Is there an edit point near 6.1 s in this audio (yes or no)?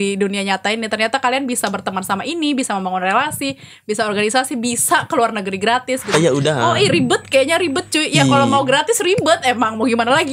yes